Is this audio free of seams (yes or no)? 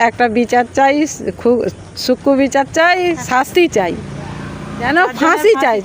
no